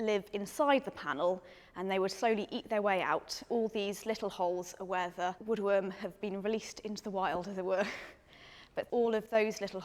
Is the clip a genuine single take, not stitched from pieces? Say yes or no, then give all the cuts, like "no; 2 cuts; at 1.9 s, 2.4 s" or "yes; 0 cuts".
no; 1 cut; at 8.8 s